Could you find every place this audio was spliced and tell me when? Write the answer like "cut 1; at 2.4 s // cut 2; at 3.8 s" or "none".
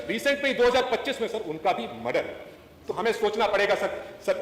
none

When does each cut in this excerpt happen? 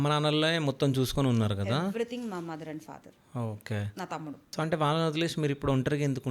cut 1; at 4.4 s

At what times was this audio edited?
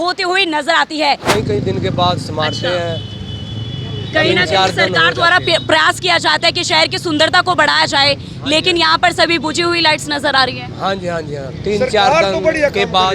cut 1; at 1.3 s

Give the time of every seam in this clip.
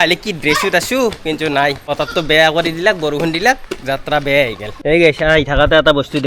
cut 1; at 1.9 s // cut 2; at 4.7 s

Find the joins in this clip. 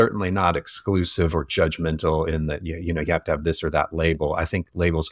none

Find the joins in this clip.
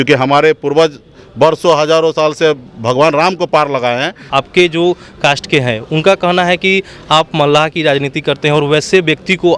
cut 1; at 4.3 s

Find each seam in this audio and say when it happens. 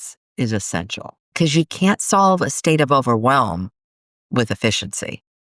cut 1; at 1.3 s

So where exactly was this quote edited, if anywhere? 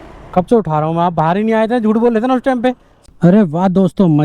cut 1; at 2.9 s

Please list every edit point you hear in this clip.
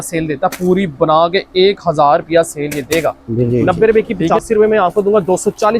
cut 1; at 3.5 s

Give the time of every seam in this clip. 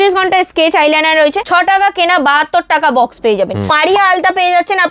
cut 1; at 1.4 s // cut 2; at 3.7 s

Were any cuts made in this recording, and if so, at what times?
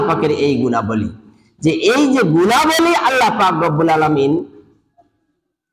none

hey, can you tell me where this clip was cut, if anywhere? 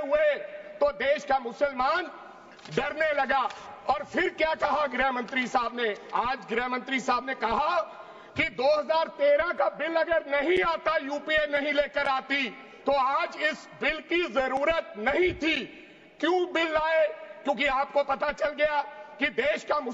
none

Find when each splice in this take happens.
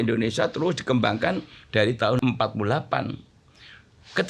cut 1; at 2.2 s

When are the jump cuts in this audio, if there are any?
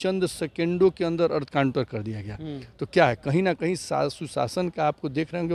none

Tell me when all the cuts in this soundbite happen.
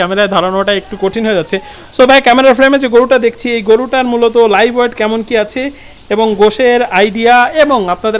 none

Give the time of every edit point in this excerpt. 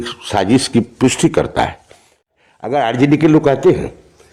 cut 1; at 2.3 s

